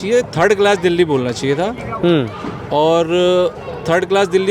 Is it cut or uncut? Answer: uncut